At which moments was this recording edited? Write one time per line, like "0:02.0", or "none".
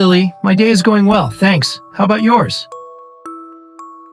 0:02.9